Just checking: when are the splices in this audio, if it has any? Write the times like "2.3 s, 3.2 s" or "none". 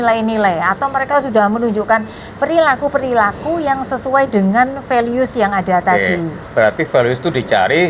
none